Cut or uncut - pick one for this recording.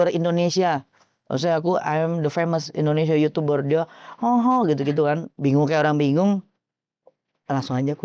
uncut